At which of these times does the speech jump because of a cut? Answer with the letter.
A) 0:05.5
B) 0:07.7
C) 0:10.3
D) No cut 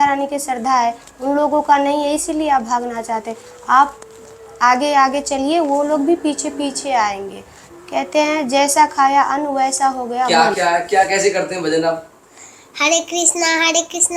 C